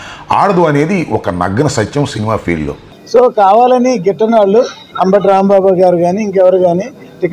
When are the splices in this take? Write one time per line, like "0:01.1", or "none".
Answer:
none